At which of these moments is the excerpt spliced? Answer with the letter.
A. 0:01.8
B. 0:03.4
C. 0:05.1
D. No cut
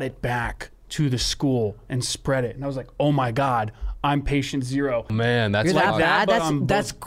C